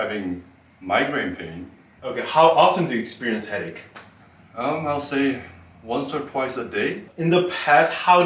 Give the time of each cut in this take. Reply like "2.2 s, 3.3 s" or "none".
1.8 s, 7.1 s